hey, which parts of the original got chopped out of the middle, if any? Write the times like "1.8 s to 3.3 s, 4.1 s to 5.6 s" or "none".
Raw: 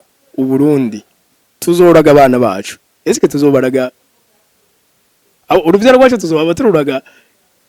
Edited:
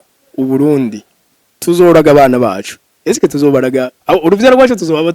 3.9 s to 5.4 s